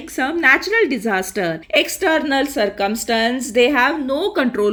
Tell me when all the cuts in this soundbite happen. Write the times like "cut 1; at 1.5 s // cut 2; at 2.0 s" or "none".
none